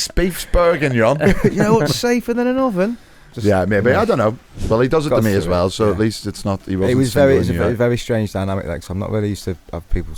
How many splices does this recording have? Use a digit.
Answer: 1